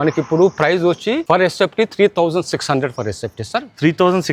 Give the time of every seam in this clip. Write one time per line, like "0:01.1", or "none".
none